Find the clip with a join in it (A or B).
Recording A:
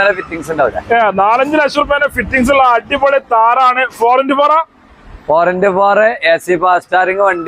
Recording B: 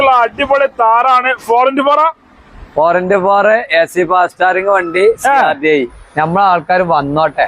B